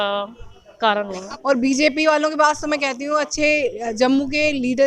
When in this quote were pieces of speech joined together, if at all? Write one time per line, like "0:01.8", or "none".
0:01.3